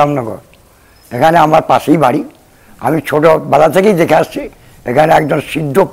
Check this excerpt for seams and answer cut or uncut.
uncut